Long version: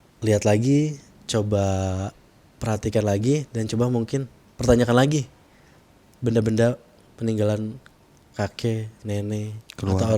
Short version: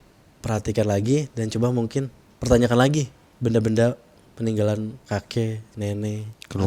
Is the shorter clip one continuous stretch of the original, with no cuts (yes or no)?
no